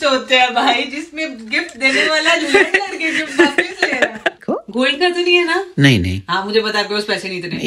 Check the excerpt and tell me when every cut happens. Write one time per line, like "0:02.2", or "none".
0:04.4